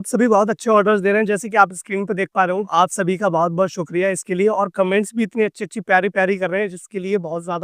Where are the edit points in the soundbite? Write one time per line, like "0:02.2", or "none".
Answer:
none